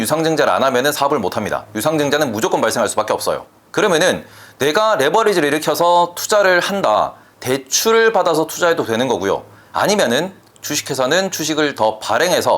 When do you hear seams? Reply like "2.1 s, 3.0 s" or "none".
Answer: none